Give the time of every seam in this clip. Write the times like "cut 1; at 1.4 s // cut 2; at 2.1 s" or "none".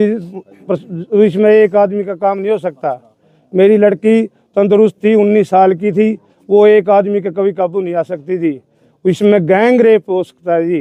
none

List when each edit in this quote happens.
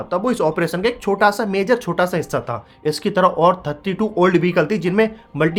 none

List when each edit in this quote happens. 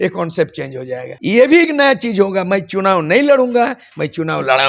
cut 1; at 1.1 s

